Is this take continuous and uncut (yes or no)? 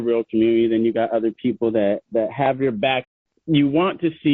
no